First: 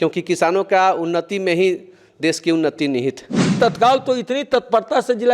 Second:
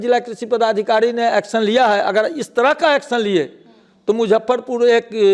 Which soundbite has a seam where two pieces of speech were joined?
first; 1 cut; at 3.6 s

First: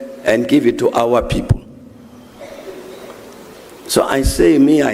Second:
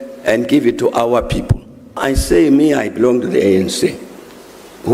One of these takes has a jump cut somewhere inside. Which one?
second; 1 cut; at 2.0 s

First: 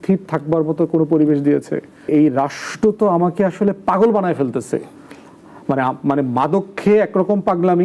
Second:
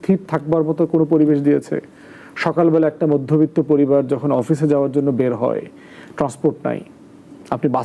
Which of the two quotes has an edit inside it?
first; 1 cut; at 2.1 s

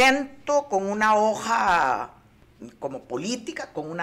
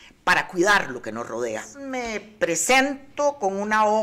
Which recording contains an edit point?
second; 1 cut; at 1.7 s

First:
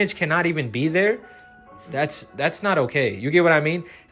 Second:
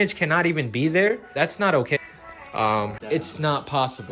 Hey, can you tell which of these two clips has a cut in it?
second; 1 cut; at 1.8 s

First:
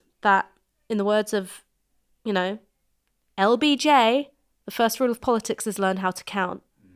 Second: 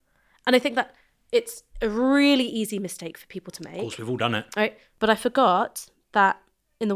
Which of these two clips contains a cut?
second; 1 cut; at 4.8 s

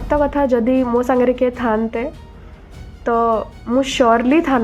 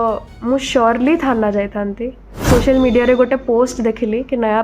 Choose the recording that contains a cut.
second; 1 cut; at 2.4 s

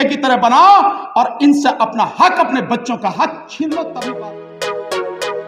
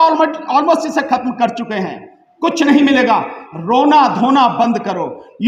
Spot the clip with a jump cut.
first; 1 cut; at 4.0 s

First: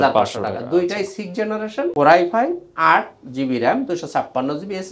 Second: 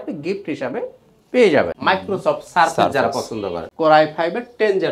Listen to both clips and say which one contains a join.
second; 2 cuts; at 1.8 s, 3.6 s

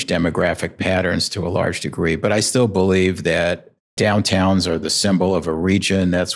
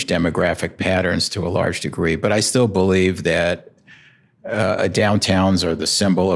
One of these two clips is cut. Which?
first; 1 cut; at 4.0 s

